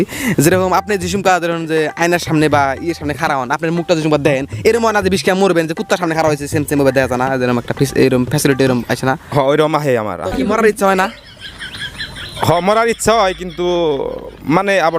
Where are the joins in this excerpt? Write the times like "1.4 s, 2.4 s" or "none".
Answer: none